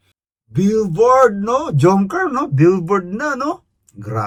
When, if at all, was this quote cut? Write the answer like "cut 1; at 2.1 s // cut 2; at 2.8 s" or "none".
none